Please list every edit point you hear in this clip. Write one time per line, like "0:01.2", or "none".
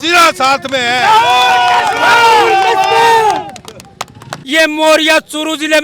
0:04.3